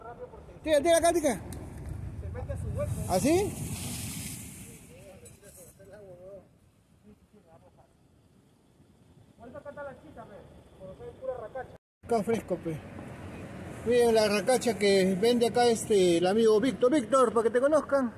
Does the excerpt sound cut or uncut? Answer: cut